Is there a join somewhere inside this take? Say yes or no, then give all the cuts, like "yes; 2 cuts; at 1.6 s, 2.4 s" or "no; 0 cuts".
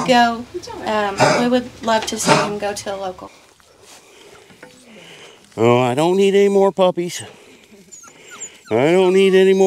yes; 1 cut; at 3.2 s